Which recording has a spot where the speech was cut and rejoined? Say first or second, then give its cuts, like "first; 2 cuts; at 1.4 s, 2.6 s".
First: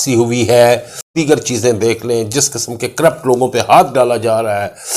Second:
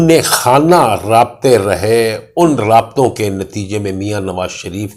first; 1 cut; at 1.1 s